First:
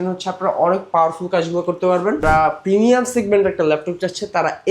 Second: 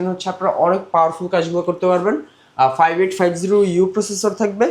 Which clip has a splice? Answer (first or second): first